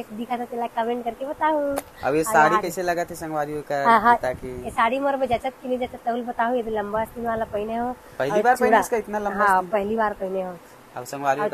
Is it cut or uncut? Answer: uncut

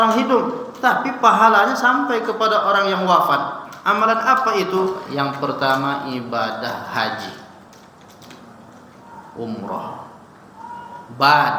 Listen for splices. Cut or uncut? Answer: cut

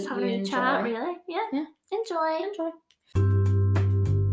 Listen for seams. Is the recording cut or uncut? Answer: cut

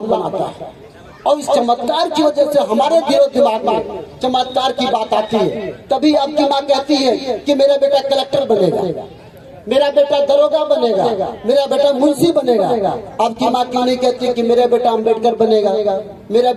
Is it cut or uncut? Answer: uncut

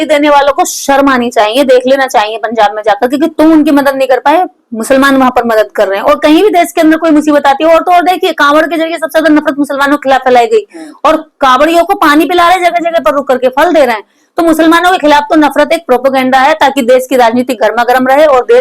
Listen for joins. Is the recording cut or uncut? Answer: uncut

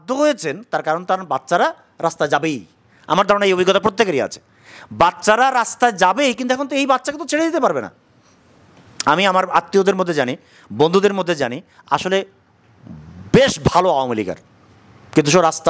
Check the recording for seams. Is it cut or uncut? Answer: uncut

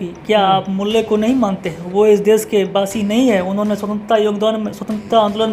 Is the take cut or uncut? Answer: uncut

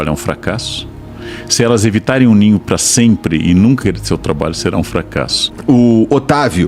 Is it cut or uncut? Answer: cut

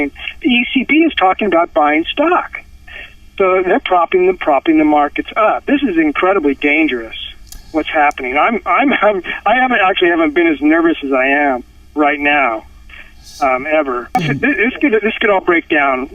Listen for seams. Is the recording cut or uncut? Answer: cut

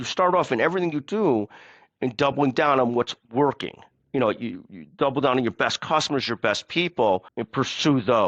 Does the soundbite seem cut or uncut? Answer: cut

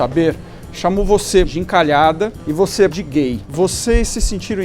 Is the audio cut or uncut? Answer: cut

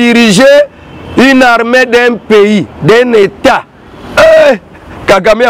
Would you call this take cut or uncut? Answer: uncut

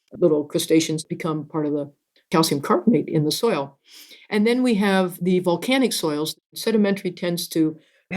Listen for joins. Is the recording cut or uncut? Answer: cut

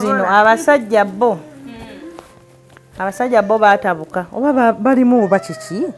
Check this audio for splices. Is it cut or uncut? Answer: uncut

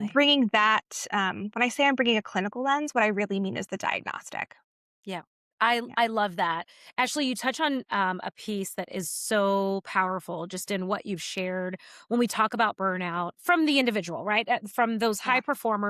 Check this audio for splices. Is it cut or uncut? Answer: uncut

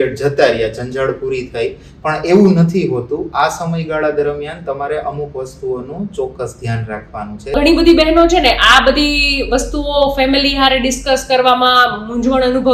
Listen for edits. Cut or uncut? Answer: cut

